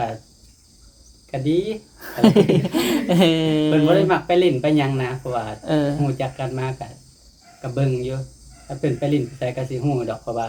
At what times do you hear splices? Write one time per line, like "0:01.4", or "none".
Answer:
none